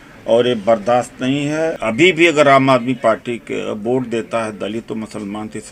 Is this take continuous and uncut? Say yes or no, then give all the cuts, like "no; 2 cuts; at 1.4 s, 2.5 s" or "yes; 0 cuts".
no; 1 cut; at 1.8 s